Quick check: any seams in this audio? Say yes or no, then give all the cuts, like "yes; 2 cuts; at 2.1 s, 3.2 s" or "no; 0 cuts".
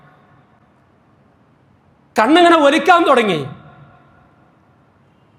no; 0 cuts